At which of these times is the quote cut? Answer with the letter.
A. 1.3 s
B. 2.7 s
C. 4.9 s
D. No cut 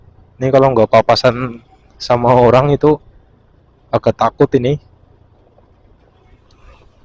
D